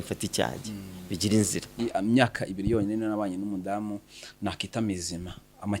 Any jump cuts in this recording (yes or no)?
yes